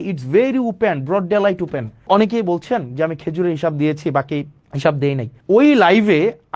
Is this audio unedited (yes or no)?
no